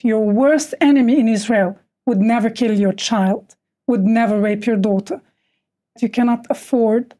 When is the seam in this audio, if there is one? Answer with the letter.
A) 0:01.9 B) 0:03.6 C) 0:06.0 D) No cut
C